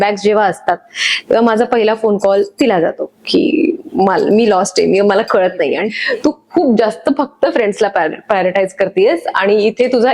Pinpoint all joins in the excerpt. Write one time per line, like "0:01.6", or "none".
0:05.9